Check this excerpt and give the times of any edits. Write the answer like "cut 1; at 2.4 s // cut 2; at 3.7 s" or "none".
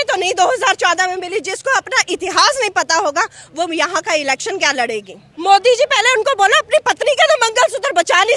cut 1; at 5.2 s